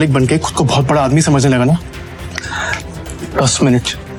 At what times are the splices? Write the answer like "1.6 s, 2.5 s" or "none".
none